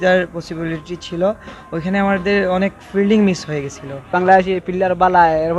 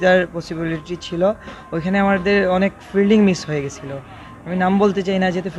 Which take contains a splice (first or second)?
first